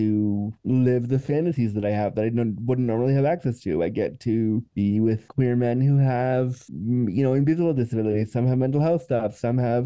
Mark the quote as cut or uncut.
uncut